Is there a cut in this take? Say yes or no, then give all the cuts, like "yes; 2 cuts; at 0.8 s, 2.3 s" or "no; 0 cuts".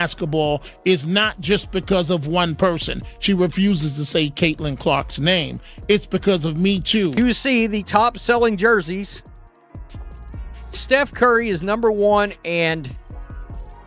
yes; 1 cut; at 7.2 s